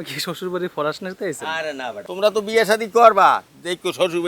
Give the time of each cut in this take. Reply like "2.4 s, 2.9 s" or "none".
2.0 s